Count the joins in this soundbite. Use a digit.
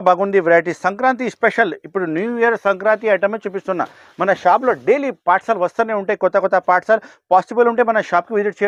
0